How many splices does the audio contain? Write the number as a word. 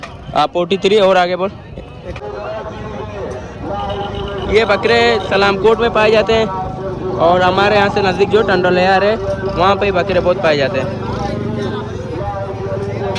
one